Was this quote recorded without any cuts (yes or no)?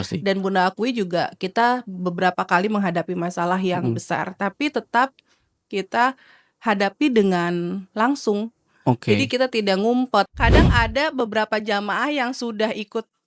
no